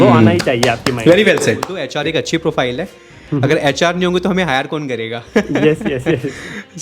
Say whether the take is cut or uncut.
cut